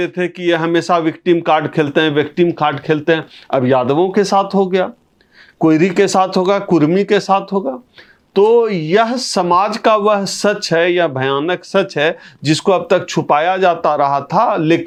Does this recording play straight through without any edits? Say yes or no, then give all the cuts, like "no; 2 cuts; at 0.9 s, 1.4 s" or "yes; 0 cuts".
yes; 0 cuts